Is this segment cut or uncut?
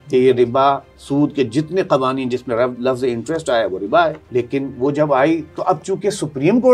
cut